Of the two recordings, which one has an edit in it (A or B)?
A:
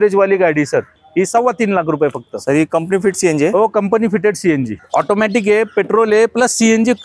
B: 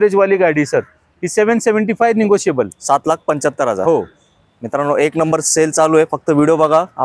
A